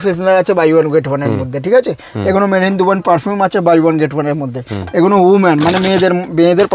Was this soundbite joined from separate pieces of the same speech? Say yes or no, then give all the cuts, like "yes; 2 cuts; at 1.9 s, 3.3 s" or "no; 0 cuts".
no; 0 cuts